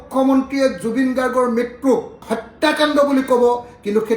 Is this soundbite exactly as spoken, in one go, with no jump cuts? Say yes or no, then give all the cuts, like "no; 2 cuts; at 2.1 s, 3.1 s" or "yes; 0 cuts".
no; 1 cut; at 2.2 s